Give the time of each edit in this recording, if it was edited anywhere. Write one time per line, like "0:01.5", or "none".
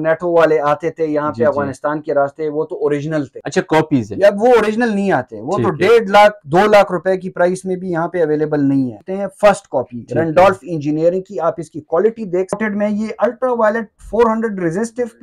0:03.4
0:09.0
0:12.6